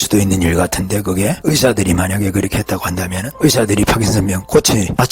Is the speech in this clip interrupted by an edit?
yes; 2 cuts; at 1.4 s, 3.3 s

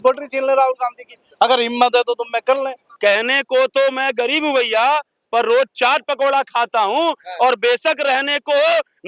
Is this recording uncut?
no; 1 cut; at 2.8 s

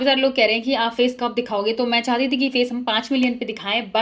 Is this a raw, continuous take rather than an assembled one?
yes; 0 cuts

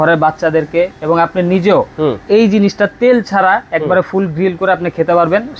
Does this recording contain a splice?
no; 0 cuts

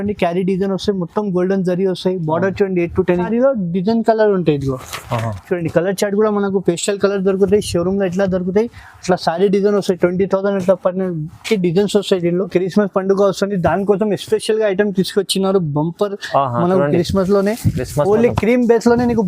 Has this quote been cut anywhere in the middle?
yes; 2 cuts; at 3.3 s, 12.5 s

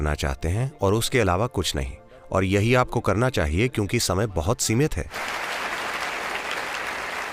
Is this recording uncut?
yes; 0 cuts

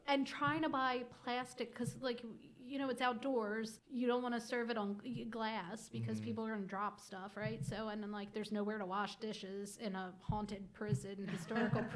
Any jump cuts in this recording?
yes; 1 cut; at 3.8 s

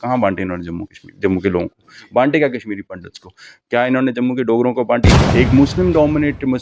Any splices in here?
yes; 1 cut; at 5.1 s

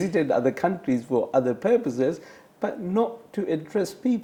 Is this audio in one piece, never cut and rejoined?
yes; 0 cuts

